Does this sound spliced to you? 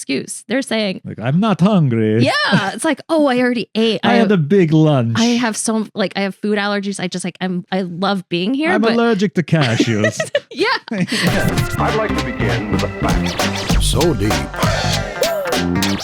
yes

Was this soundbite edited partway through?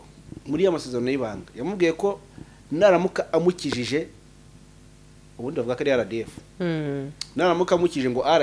no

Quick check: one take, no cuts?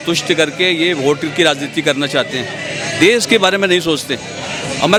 yes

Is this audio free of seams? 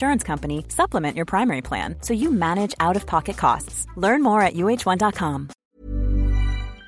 no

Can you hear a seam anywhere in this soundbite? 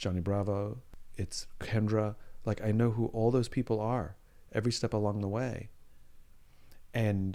no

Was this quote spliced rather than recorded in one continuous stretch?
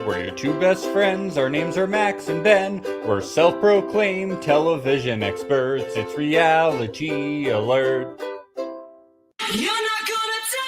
yes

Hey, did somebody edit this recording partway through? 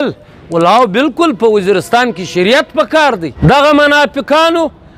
yes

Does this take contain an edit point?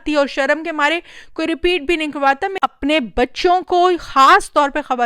yes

